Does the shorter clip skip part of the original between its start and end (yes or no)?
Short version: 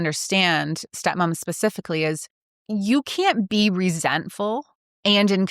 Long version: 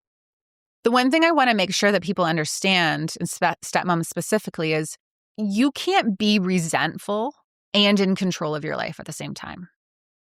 yes